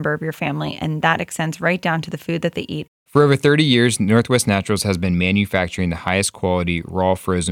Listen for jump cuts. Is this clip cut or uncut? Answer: cut